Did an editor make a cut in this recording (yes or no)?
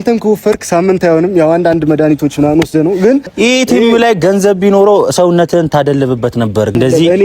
yes